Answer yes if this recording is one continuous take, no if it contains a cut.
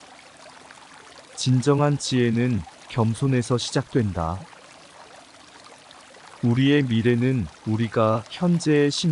no